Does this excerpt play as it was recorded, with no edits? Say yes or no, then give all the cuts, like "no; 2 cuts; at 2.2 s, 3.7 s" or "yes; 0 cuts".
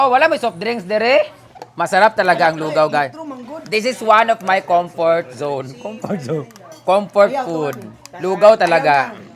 yes; 0 cuts